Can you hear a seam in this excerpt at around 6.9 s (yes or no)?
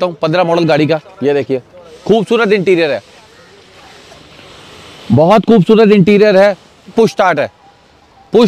yes